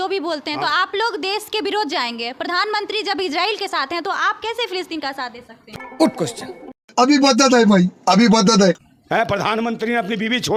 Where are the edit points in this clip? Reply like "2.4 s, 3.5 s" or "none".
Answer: none

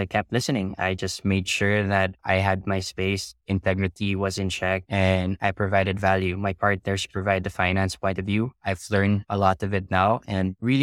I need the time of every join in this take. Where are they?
none

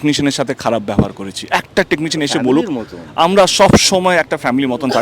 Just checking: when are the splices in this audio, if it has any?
none

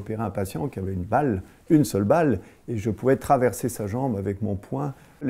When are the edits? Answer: none

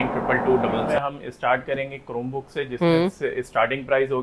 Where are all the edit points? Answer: 0.9 s

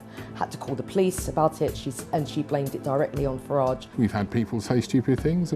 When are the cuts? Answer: 3.9 s

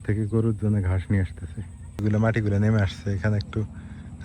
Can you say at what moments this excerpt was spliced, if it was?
2.0 s

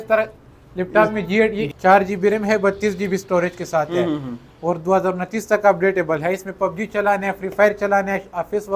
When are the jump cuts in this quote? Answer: 1.6 s

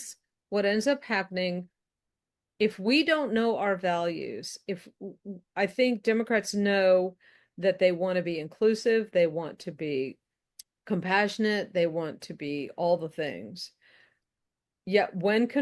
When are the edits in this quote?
none

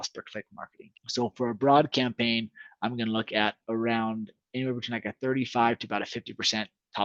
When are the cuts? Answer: none

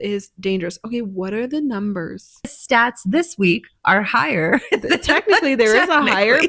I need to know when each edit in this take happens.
2.5 s

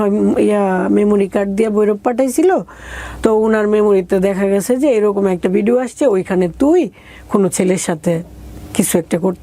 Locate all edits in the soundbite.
none

